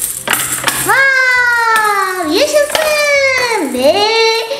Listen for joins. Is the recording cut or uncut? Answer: uncut